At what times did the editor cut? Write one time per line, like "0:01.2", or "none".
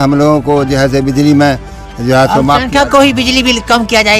none

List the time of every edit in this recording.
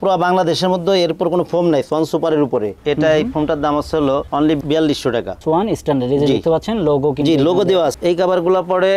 0:02.7
0:08.0

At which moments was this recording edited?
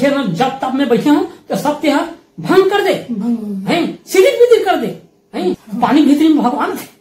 0:05.6

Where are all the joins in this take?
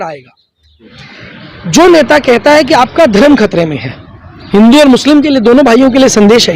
0:00.9

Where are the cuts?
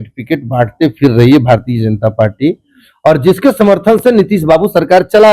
none

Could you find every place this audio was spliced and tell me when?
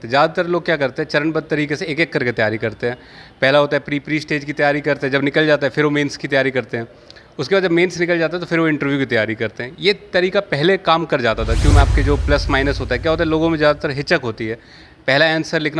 0:11.7

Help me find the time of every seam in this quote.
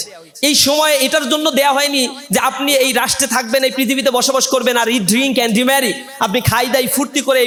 none

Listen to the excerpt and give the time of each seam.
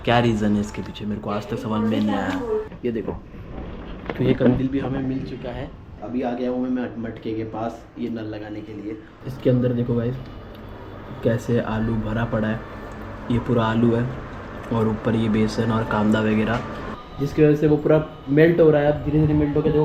0:02.7
0:06.0
0:09.2
0:16.9

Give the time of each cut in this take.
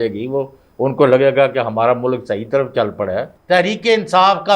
0:03.3

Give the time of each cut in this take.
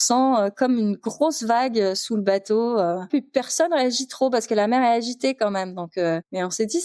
0:03.1

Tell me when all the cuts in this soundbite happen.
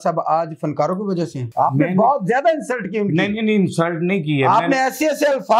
0:01.4

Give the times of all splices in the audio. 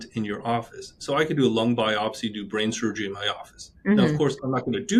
none

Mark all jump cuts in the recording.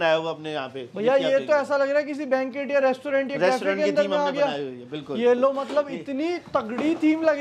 none

